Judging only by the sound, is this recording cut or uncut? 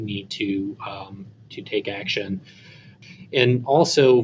cut